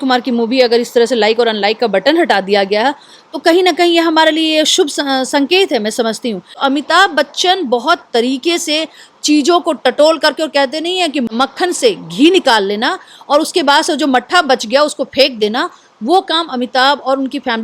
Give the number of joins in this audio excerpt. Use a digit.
2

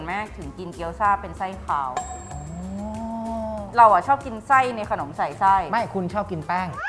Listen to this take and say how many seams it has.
0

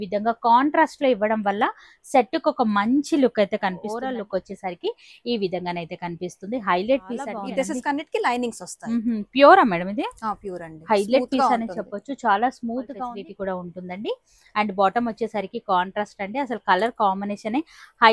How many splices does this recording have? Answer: 3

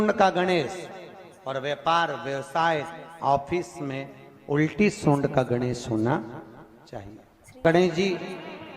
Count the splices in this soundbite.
1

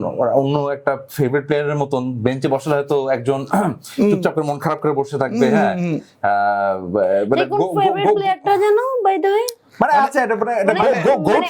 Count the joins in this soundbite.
0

